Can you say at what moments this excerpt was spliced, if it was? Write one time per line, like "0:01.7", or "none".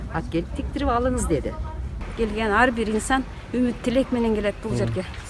0:02.0